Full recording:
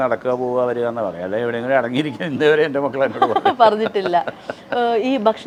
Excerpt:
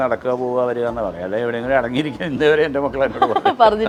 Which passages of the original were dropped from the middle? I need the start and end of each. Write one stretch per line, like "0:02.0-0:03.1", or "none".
none